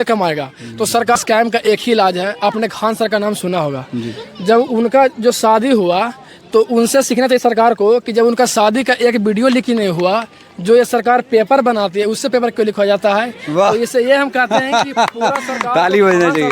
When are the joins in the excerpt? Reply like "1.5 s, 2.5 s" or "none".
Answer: 1.2 s